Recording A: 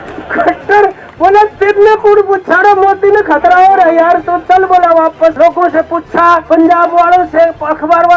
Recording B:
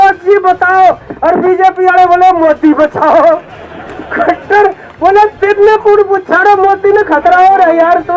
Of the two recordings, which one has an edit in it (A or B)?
A